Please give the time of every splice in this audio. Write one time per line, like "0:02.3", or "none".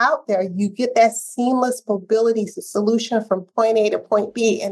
none

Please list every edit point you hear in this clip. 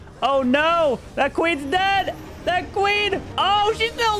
0:03.3

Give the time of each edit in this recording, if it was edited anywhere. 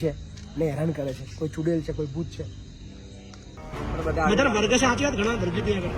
0:03.6

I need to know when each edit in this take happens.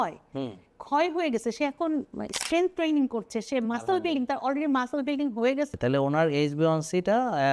0:05.7

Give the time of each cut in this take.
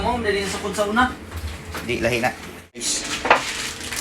0:03.0

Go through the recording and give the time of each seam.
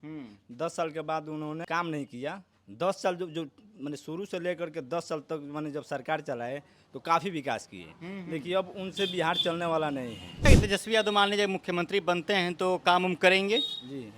0:01.7
0:10.5

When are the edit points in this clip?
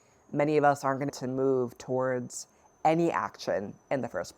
0:01.1

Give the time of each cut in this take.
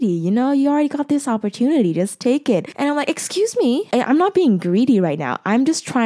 0:02.7
0:03.9

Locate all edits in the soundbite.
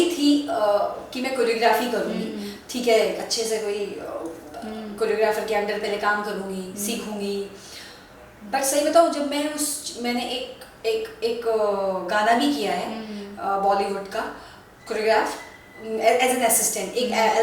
none

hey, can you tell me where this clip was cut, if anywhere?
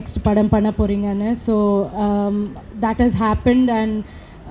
none

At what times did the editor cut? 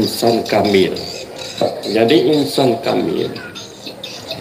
0:01.5

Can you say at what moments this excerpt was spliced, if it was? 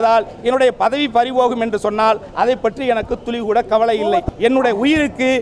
0:04.3

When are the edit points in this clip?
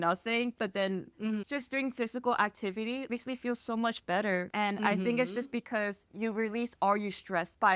0:01.4

